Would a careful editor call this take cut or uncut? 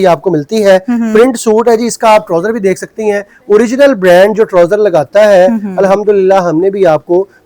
uncut